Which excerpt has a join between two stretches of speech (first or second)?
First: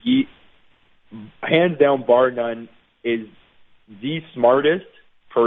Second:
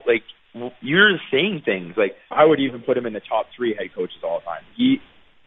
second